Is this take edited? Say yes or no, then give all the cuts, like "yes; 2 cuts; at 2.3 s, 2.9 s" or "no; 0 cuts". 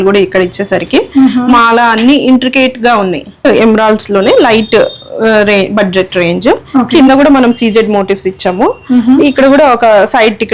yes; 1 cut; at 3.5 s